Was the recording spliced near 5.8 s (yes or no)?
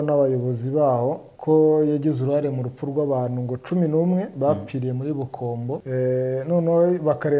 yes